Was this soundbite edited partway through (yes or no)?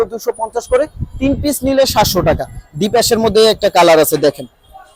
no